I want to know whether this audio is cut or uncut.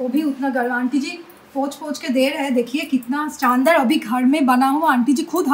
uncut